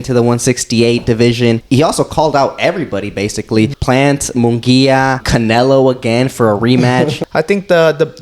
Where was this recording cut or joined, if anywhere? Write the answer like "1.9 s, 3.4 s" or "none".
1.6 s, 3.8 s, 5.2 s, 7.2 s